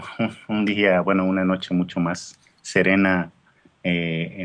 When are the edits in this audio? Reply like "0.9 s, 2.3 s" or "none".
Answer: 1.9 s